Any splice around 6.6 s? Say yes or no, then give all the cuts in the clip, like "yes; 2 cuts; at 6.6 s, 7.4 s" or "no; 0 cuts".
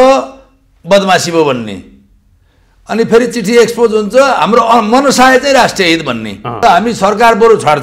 yes; 1 cut; at 6.6 s